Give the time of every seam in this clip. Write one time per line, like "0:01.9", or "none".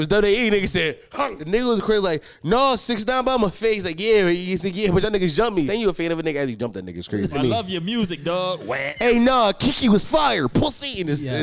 0:01.4
0:05.7
0:07.4
0:08.9